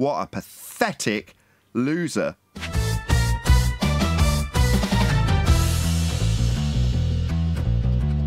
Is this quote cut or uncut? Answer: cut